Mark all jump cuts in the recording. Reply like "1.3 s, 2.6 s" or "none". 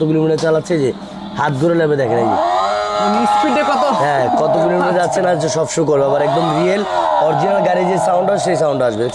none